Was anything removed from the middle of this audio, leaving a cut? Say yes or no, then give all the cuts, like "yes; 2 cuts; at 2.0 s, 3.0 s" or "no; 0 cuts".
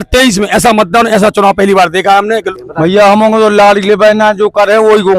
yes; 1 cut; at 2.5 s